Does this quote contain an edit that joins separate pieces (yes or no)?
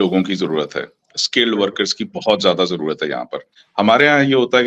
yes